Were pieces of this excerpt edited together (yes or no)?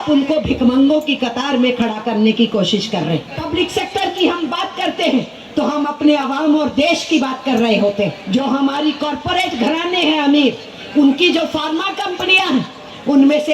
yes